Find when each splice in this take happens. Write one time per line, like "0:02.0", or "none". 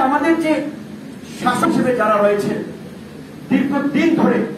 0:01.6

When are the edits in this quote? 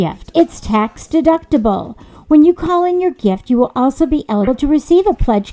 0:04.5

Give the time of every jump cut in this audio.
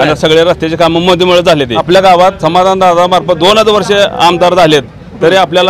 0:01.8

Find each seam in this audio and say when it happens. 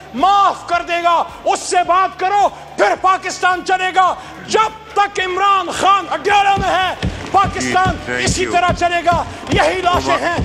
none

